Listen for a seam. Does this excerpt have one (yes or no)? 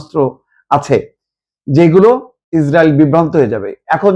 yes